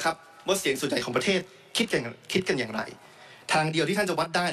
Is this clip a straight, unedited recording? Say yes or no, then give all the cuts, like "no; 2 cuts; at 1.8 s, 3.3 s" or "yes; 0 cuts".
yes; 0 cuts